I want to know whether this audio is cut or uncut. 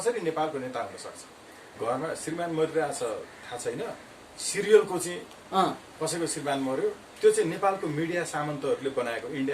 cut